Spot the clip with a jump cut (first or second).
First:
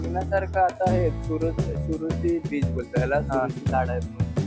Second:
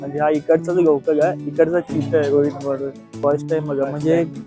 second